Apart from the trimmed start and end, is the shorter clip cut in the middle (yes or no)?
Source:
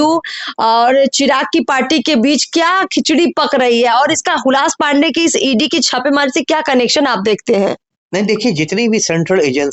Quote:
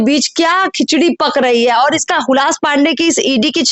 no